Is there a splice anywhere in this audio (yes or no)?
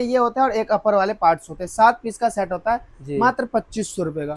no